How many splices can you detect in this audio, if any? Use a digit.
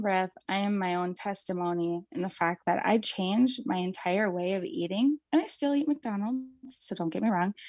0